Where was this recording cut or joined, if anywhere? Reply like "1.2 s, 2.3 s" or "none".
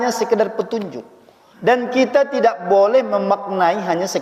none